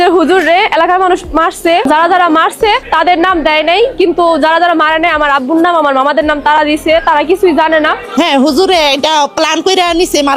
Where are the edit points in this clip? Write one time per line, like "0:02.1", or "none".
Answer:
0:01.9
0:02.8
0:08.1